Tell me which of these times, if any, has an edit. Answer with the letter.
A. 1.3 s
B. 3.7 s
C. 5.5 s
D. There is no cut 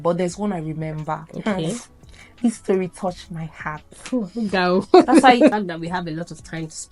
C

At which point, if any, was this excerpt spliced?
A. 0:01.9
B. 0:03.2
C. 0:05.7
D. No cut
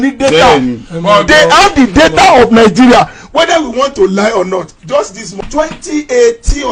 C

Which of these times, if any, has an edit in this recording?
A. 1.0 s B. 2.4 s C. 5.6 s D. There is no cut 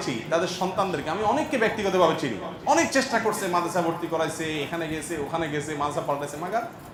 D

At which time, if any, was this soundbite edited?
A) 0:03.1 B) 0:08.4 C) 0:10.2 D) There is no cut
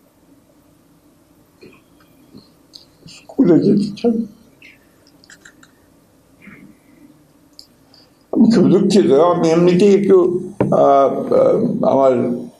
D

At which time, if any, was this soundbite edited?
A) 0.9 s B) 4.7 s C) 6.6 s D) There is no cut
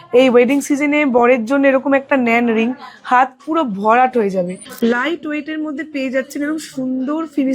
B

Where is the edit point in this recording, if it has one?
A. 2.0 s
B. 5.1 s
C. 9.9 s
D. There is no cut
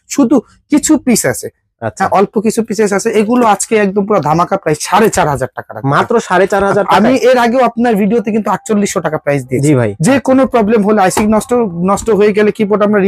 C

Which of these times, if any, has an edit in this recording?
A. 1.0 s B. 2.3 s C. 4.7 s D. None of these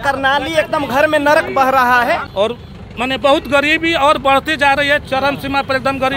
B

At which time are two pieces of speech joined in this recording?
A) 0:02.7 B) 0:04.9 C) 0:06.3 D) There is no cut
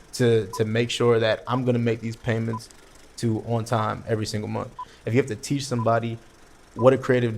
B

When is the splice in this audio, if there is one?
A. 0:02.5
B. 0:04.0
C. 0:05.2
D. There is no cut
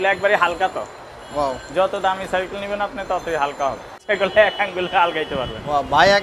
B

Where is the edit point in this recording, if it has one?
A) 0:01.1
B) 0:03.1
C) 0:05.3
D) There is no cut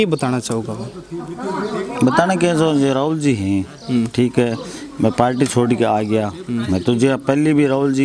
D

